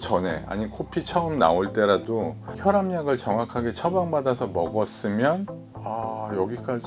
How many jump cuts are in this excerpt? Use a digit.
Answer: 2